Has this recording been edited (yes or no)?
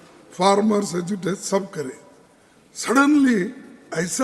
no